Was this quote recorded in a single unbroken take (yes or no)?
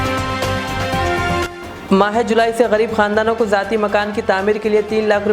yes